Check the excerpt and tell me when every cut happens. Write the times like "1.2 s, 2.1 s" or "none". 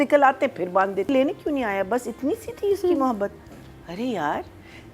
1.1 s